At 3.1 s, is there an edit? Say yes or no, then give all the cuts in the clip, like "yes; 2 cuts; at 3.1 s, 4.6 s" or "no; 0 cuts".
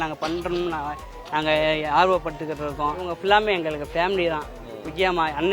yes; 1 cut; at 3.1 s